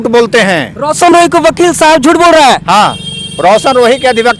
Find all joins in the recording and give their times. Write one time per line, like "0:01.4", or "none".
none